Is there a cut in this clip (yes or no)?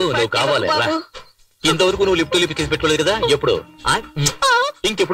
no